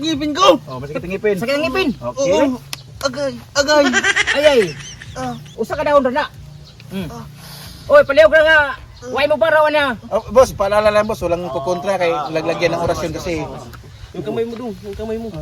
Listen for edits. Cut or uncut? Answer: uncut